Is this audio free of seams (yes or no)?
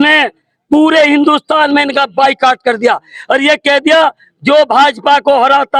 yes